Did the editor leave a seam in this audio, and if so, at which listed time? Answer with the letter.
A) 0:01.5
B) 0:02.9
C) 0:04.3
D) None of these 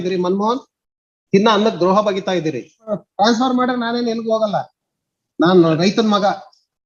B